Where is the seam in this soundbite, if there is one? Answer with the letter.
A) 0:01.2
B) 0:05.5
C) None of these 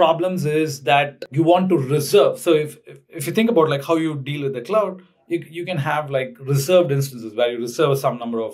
A